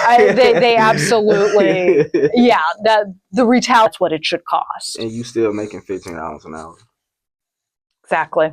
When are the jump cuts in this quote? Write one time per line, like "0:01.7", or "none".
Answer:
0:03.9